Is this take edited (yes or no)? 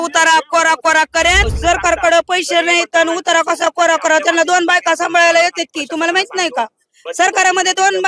yes